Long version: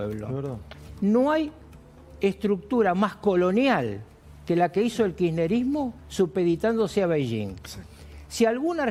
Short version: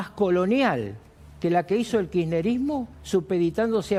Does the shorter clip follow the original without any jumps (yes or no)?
yes